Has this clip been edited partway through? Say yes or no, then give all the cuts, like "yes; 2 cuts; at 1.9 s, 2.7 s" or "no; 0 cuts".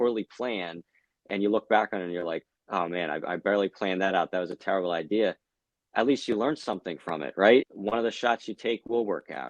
yes; 1 cut; at 7.7 s